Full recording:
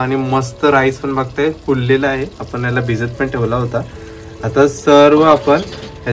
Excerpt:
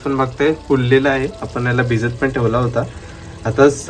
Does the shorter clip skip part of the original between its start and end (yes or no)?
no